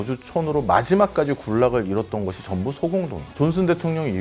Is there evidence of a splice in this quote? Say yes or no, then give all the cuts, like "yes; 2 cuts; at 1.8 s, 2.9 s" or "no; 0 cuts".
yes; 1 cut; at 3.2 s